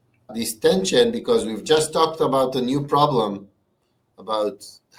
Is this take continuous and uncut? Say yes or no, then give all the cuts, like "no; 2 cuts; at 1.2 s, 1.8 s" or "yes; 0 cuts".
yes; 0 cuts